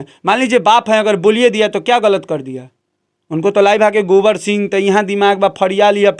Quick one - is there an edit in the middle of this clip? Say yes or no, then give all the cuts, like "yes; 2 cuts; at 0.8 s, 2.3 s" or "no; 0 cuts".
no; 0 cuts